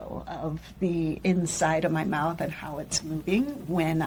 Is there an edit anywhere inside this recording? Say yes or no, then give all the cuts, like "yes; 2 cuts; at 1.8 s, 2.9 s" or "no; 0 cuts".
no; 0 cuts